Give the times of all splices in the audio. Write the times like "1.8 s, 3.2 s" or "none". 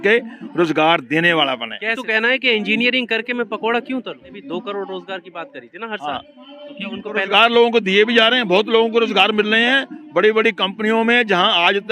2.0 s, 4.4 s